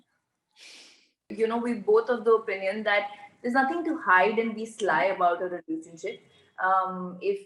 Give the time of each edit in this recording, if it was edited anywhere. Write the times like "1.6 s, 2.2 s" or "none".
1.3 s